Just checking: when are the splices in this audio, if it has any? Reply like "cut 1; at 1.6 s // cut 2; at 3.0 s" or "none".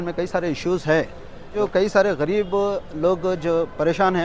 cut 1; at 1.5 s